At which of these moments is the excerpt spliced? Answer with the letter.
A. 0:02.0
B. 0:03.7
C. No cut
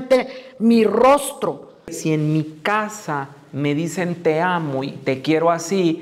A